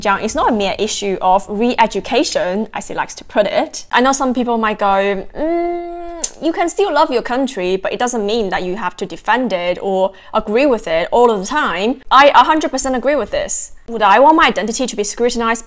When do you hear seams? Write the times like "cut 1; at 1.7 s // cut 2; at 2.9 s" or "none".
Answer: cut 1; at 3.8 s // cut 2; at 12.0 s